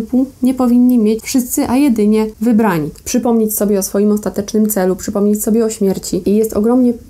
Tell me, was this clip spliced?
yes; 3 cuts; at 1.2 s, 2.8 s, 6.2 s

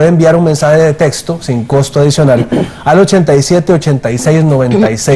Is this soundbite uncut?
no; 1 cut; at 1.2 s

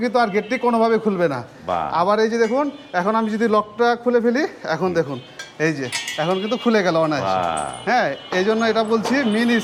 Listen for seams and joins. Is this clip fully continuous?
yes; 0 cuts

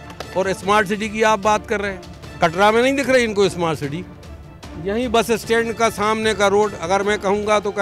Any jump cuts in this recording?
no; 0 cuts

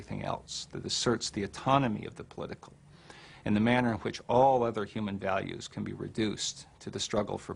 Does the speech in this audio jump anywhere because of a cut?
yes; 1 cut; at 1.8 s

